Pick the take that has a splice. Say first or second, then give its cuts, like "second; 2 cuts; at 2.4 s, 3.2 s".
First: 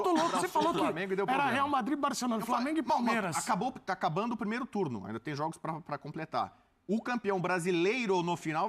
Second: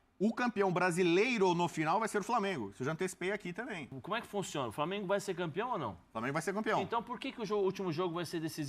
second; 1 cut; at 3.9 s